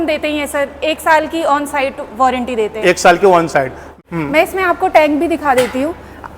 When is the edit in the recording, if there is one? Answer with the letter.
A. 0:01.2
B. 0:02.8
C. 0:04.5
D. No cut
D